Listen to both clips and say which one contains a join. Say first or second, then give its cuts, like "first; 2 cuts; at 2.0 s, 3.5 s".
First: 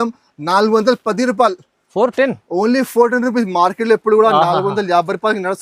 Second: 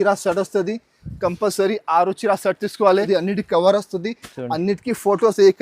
second; 1 cut; at 3.1 s